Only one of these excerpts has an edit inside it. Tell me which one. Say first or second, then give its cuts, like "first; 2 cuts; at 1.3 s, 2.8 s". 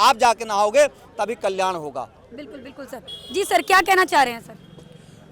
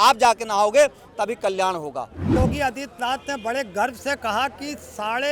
second; 1 cut; at 2.3 s